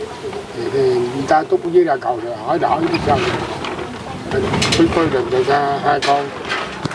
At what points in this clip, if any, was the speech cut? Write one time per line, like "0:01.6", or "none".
0:04.4